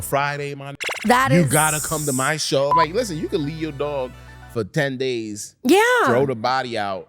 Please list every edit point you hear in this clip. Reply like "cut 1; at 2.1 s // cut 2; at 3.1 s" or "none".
cut 1; at 2.7 s